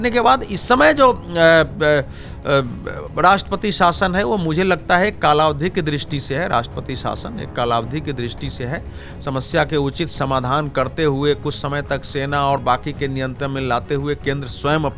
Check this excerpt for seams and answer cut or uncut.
uncut